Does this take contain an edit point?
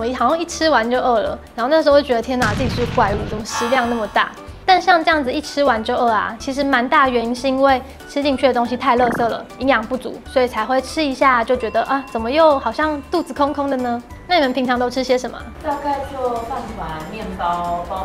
no; 0 cuts

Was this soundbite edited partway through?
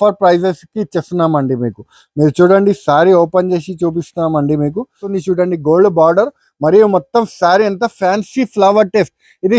yes; 1 cut; at 5.1 s

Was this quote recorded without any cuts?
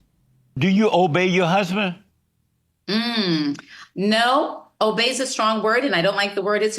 yes; 0 cuts

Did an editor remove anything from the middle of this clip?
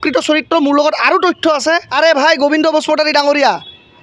yes; 1 cut; at 1.9 s

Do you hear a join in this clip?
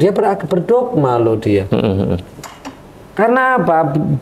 no; 0 cuts

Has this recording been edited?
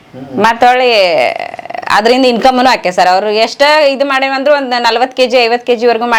no; 0 cuts

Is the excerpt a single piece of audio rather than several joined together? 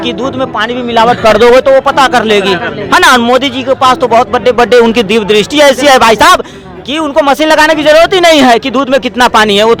yes; 0 cuts

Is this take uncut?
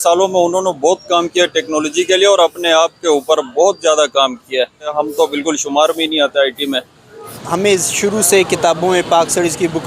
no; 2 cuts; at 4.9 s, 7.2 s

